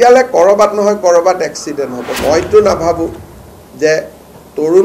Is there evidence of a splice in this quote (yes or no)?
yes